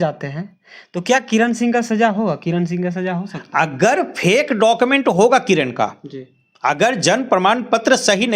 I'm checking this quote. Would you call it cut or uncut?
uncut